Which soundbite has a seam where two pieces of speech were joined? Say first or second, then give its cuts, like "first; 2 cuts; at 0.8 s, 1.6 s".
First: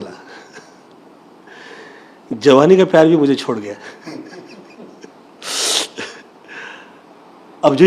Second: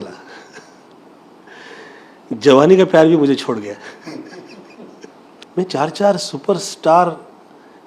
second; 1 cut; at 5.4 s